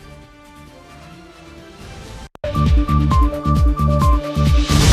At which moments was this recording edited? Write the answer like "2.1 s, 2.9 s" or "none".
2.3 s